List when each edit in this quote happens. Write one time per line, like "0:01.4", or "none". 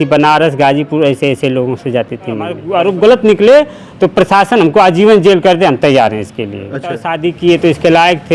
0:02.6
0:07.1